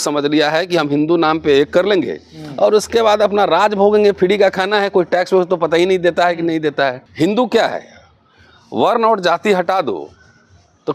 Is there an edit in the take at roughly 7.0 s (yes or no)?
yes